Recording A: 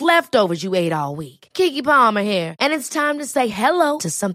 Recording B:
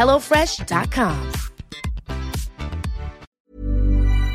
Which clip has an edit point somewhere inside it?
B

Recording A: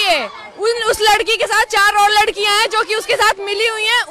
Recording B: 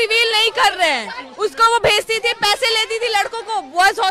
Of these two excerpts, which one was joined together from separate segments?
B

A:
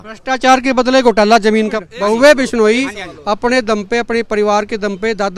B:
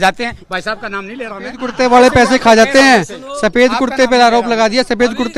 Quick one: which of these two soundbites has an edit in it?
A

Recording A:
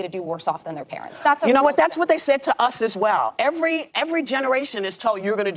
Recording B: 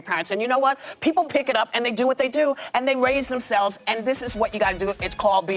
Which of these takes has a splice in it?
A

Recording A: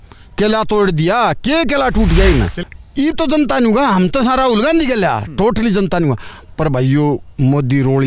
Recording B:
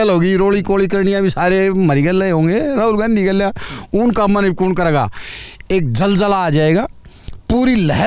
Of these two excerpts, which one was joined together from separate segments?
A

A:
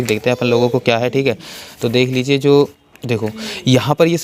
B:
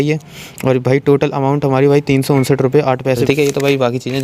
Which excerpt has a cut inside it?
B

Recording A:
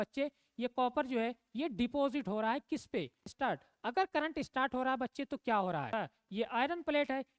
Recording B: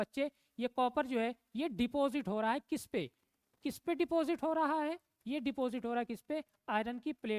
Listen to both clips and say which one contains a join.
A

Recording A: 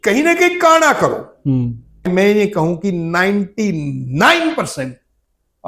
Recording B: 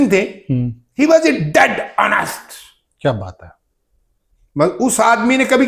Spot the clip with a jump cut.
A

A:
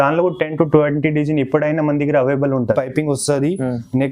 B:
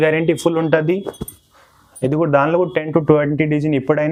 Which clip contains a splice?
A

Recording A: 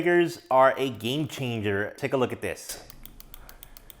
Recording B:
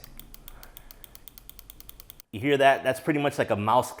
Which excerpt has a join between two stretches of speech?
A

